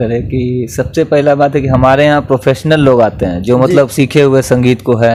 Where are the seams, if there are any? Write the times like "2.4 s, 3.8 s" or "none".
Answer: none

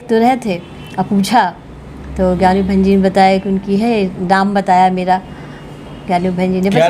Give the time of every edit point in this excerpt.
none

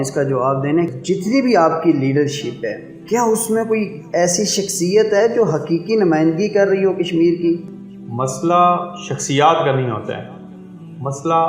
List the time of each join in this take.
0.9 s, 2.9 s, 7.7 s

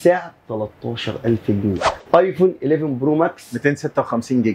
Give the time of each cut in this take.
1.9 s

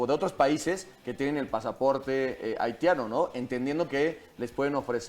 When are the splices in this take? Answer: none

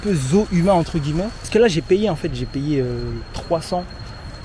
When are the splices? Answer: none

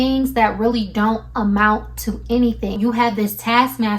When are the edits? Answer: 2.8 s

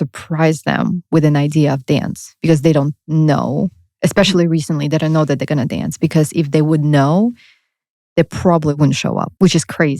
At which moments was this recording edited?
8.8 s

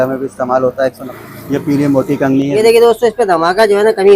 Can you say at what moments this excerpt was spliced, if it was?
1.0 s, 2.5 s

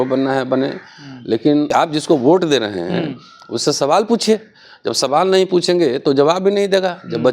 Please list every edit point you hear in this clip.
1.7 s

